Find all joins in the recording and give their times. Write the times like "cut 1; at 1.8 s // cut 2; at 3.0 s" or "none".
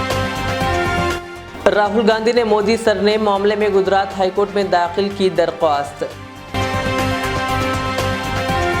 cut 1; at 0.9 s